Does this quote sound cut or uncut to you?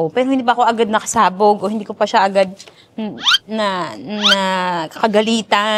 uncut